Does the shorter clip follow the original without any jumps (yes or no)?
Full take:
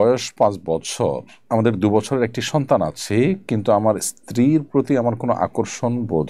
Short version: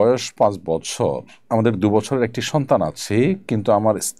yes